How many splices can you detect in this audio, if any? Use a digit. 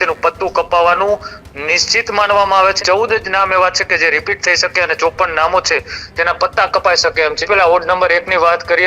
2